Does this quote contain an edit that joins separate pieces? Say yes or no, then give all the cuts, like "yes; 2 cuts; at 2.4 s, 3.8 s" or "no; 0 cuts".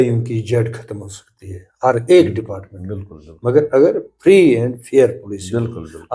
no; 0 cuts